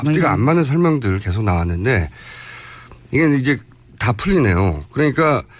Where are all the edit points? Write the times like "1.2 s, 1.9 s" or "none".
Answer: 3.5 s